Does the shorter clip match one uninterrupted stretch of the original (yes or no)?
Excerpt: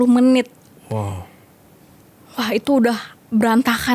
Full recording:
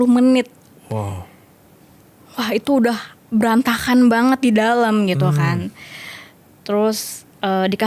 yes